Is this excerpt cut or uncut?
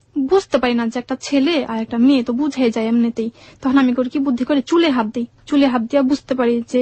uncut